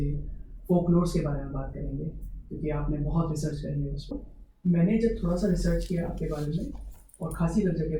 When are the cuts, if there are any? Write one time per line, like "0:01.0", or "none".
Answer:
0:04.1